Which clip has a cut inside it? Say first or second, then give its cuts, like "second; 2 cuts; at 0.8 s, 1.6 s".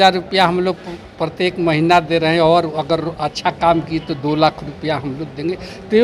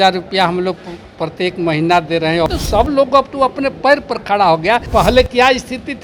second; 2 cuts; at 2.5 s, 4.9 s